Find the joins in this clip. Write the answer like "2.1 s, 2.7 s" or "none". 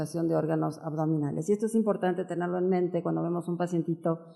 3.3 s